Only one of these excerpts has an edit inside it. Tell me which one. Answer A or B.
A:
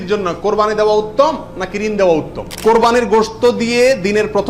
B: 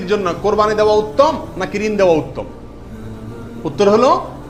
A